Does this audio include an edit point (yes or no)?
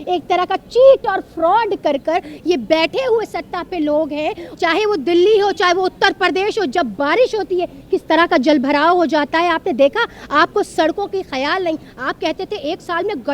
yes